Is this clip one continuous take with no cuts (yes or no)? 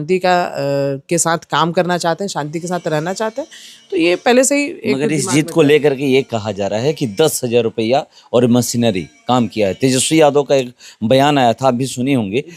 yes